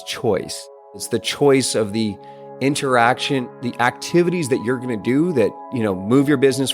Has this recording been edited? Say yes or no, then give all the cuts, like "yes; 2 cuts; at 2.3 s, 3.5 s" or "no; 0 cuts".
yes; 3 cuts; at 1.0 s, 3.5 s, 5.6 s